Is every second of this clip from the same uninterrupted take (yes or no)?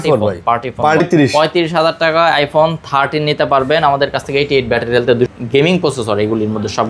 no